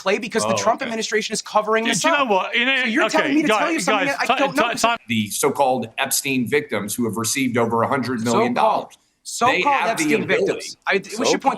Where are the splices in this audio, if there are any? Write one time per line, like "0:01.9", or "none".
0:05.0